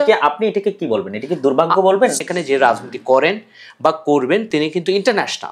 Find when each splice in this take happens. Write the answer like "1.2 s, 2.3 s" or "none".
2.2 s